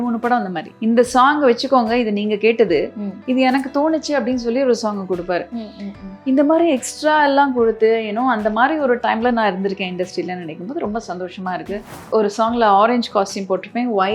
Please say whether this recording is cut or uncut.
cut